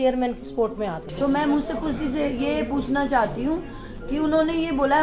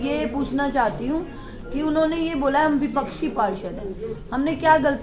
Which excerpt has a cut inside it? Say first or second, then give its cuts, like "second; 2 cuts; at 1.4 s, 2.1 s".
first; 1 cut; at 1.0 s